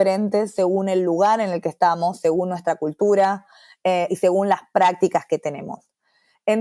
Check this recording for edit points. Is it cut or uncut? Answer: uncut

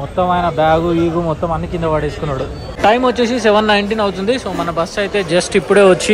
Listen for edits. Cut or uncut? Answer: uncut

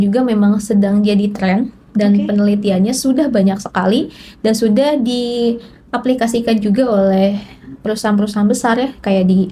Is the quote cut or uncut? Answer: uncut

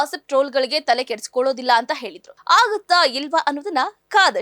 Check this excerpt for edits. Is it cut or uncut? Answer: cut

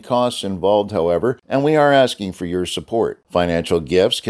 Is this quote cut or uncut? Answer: cut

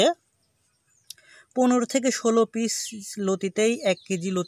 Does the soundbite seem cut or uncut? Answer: uncut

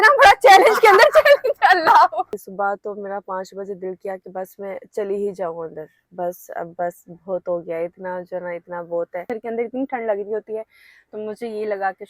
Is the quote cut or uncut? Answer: cut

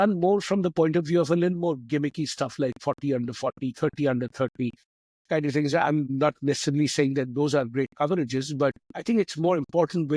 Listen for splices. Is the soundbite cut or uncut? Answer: uncut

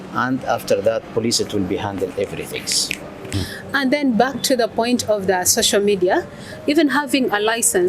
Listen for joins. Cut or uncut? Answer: cut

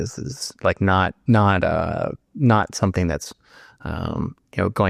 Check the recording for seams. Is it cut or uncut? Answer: uncut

